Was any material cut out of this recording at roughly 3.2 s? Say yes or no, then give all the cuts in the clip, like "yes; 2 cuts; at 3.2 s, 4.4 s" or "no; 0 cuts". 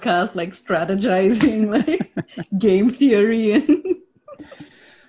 no; 0 cuts